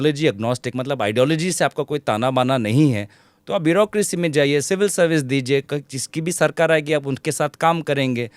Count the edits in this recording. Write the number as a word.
zero